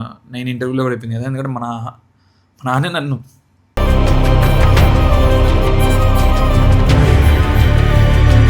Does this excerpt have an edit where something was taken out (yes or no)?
no